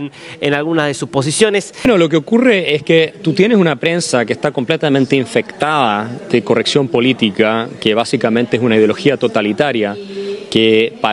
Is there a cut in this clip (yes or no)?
yes